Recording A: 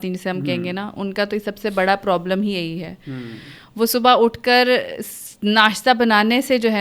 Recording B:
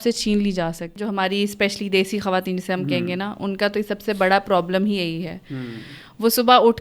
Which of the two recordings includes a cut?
B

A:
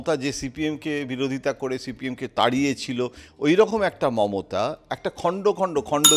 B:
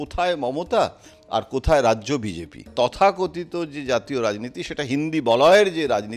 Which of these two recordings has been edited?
B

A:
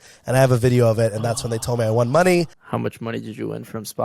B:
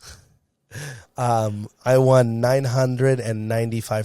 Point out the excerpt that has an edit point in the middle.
A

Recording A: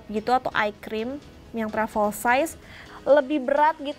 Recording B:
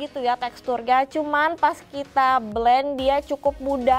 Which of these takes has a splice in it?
A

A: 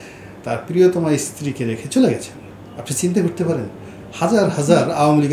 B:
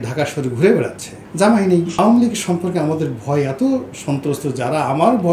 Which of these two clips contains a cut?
B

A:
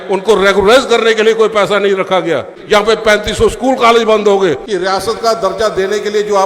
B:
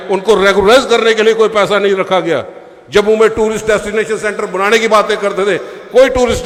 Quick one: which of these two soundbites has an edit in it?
A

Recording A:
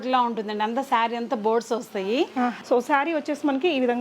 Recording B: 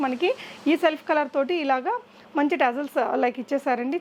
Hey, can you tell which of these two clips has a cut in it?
A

